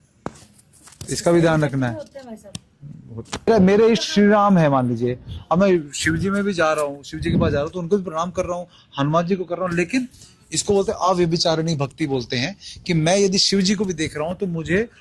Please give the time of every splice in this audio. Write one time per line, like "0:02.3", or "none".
0:03.5